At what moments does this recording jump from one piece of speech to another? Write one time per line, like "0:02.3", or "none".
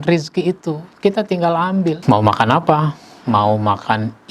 0:02.0

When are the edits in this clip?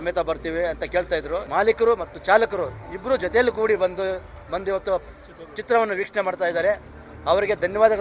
0:01.5

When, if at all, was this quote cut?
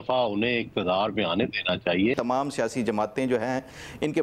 0:02.1

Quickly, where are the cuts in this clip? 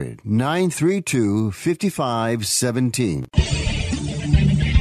0:03.3

